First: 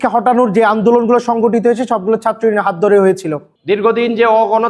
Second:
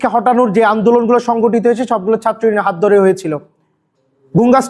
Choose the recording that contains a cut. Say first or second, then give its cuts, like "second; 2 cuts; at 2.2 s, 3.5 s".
first; 1 cut; at 3.5 s